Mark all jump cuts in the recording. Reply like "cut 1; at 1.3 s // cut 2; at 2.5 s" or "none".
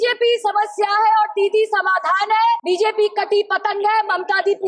cut 1; at 2.6 s

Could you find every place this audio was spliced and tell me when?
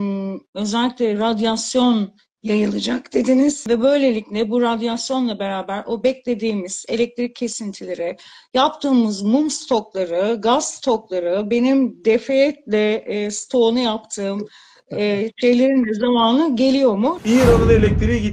cut 1; at 3.6 s // cut 2; at 17.2 s

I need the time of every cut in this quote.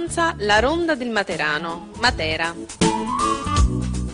cut 1; at 2.6 s

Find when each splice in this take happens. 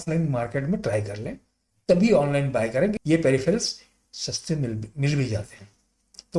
cut 1; at 2.9 s

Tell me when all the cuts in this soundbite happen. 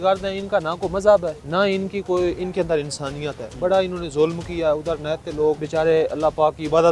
cut 1; at 1.4 s // cut 2; at 5.6 s

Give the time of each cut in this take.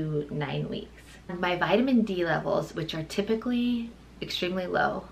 cut 1; at 1.3 s

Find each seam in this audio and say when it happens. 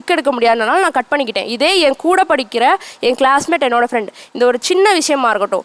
none

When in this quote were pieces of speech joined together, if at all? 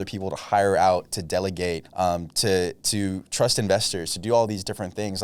cut 1; at 1.8 s

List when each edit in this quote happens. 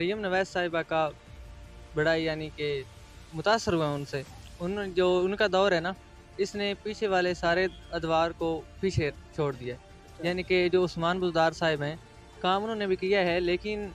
none

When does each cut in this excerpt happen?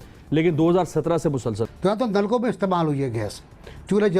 cut 1; at 1.6 s

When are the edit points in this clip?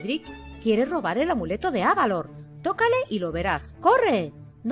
none

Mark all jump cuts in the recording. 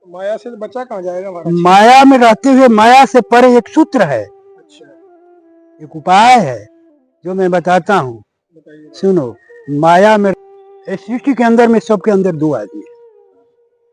cut 1; at 10.3 s

